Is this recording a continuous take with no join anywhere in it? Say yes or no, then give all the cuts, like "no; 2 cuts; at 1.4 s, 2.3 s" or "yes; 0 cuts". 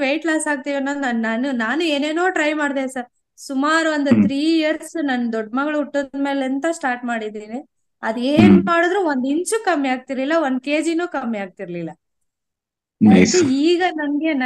yes; 0 cuts